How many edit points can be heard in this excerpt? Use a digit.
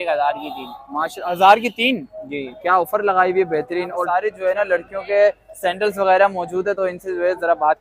1